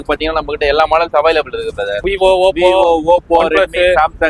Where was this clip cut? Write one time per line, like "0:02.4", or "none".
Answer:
0:02.1